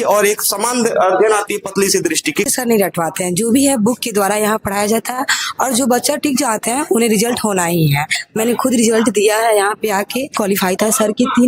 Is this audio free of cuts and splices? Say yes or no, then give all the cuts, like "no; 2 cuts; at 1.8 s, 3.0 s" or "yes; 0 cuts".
no; 3 cuts; at 2.5 s, 8.2 s, 10.4 s